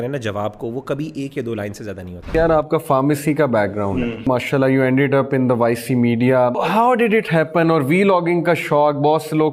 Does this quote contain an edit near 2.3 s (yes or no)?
yes